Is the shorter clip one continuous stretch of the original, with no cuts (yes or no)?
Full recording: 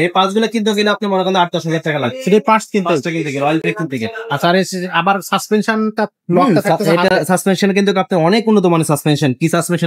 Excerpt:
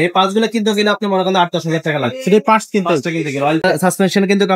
no